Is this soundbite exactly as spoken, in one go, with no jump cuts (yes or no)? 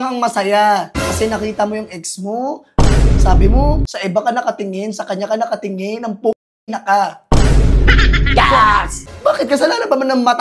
no